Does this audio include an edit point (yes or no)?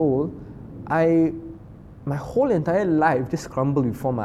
no